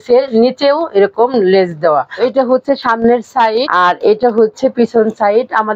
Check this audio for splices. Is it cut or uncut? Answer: cut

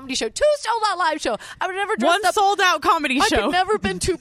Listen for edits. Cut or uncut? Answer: uncut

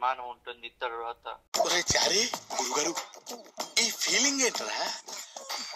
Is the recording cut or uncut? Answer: cut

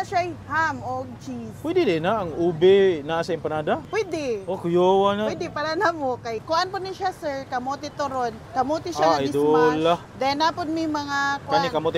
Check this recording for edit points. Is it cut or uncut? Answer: cut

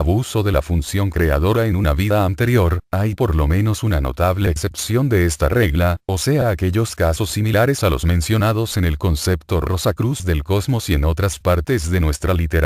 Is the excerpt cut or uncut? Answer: cut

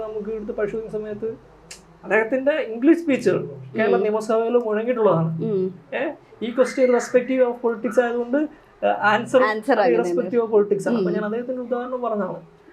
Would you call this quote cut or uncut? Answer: uncut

